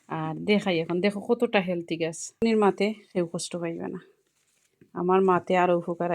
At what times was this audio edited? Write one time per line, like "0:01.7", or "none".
0:02.4